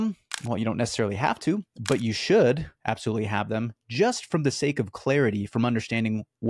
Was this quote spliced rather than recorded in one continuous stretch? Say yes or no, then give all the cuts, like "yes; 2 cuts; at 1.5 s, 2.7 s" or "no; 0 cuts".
no; 0 cuts